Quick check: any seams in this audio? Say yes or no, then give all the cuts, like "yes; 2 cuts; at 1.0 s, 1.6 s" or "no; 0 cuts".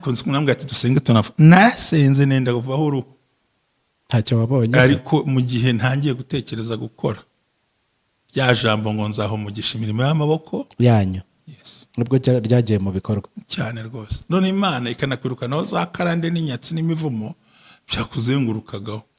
no; 0 cuts